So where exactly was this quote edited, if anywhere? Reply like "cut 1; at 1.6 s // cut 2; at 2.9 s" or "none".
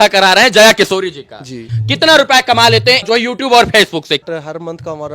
cut 1; at 1.7 s // cut 2; at 3.0 s // cut 3; at 4.3 s